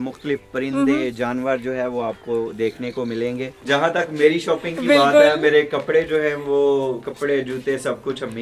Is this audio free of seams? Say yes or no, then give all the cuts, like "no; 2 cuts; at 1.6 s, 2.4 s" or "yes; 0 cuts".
no; 1 cut; at 3.6 s